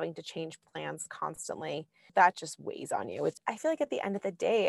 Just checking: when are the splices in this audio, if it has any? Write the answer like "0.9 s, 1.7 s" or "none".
2.0 s, 3.4 s